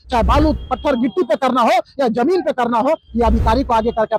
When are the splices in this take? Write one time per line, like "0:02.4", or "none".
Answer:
none